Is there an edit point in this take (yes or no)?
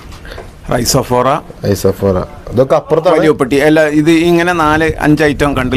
no